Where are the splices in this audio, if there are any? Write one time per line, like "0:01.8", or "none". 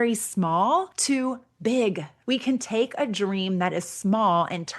0:00.9
0:02.1